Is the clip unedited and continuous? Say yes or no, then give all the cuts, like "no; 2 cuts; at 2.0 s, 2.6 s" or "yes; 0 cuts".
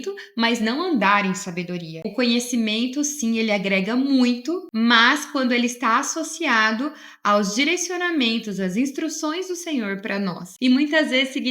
no; 3 cuts; at 2.0 s, 4.7 s, 10.5 s